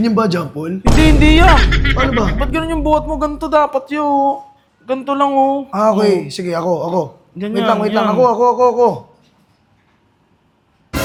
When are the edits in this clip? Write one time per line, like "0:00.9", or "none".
none